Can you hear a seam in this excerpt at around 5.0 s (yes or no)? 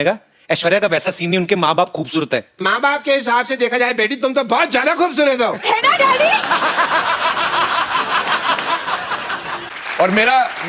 no